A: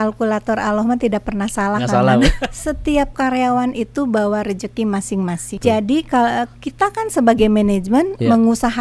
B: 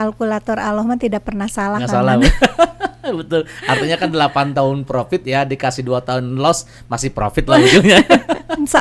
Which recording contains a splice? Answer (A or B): A